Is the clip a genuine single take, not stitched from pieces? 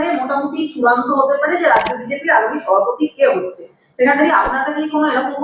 yes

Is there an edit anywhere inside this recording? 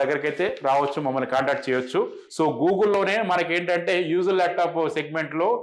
yes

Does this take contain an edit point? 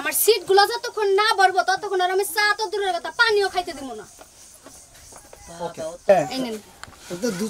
yes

